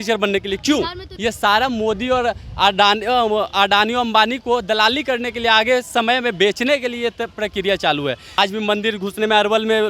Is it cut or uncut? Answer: cut